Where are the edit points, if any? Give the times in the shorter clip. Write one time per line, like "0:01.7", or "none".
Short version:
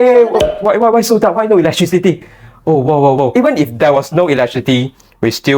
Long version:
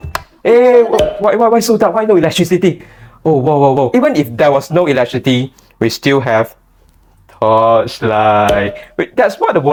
none